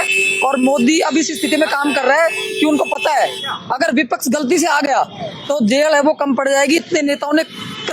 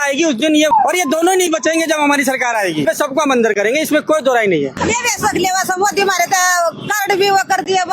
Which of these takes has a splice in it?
second; 3 cuts; at 0.7 s, 2.8 s, 4.8 s

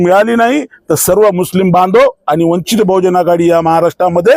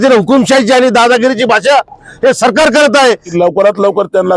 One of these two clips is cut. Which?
second; 1 cut; at 3.3 s

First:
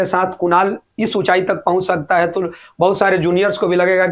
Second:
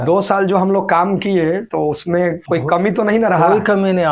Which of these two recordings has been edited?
second; 1 cut; at 1.8 s

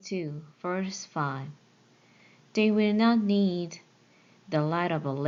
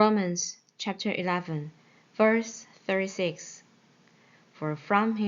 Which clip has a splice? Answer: second; 1 cut; at 1.0 s

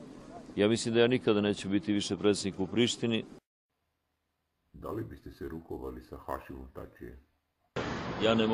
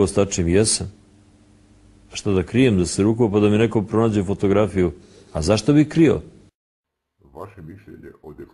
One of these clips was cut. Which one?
second; 1 cut; at 3.3 s

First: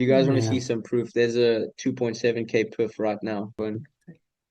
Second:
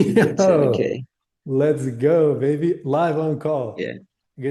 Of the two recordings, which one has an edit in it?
first; 1 cut; at 3.6 s

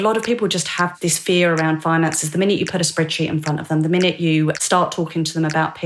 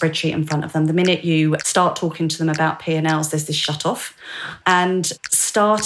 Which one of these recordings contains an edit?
first; 1 cut; at 0.9 s

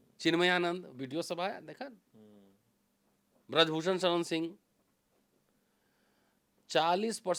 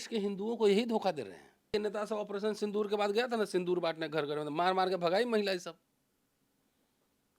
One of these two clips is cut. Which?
second; 1 cut; at 1.7 s

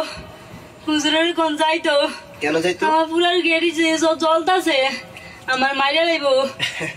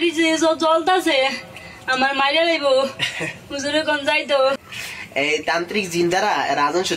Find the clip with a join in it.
second; 1 cut; at 4.5 s

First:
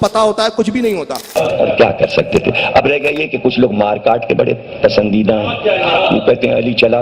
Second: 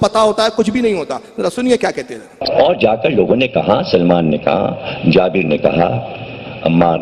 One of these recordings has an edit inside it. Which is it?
first; 1 cut; at 1.3 s

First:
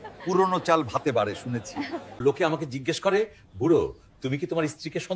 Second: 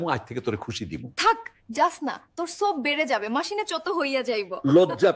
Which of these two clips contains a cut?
first; 1 cut; at 2.1 s

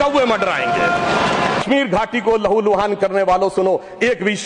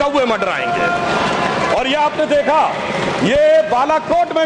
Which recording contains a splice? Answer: first; 1 cut; at 1.6 s

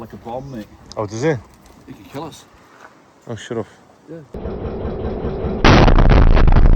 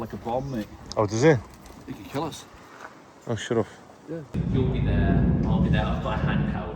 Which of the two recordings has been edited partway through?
second; 1 cut; at 4.3 s

